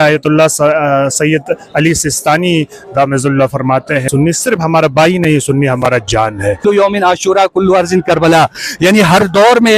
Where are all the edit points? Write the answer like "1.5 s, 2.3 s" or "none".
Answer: 4.0 s, 6.6 s